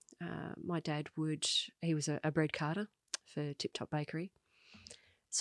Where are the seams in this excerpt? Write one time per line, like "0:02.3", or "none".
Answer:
none